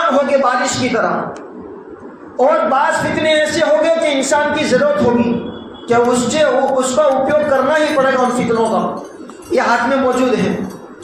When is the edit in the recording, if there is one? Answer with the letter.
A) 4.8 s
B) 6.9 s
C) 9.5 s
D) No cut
D